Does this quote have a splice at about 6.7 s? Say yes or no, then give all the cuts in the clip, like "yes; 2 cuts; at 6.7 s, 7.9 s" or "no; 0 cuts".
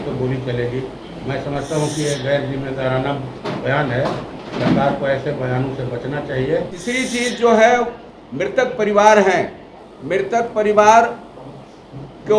yes; 1 cut; at 6.7 s